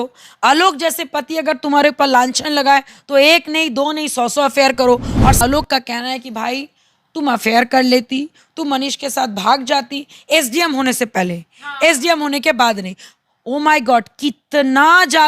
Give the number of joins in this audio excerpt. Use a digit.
1